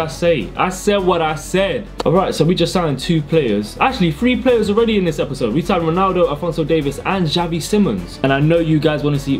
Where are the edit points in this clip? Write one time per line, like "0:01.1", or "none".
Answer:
0:02.0
0:08.2

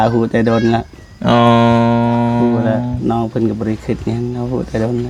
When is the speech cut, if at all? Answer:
none

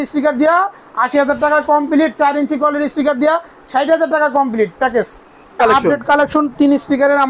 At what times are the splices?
0:05.6

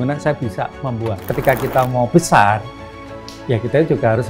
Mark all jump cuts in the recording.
0:01.2

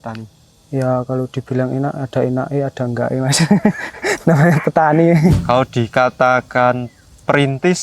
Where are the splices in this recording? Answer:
0:05.4

